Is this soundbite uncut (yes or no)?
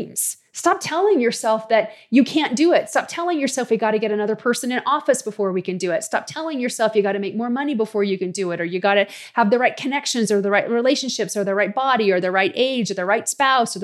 yes